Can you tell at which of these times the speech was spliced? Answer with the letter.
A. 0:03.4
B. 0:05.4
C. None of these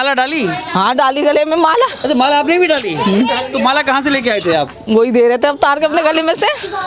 C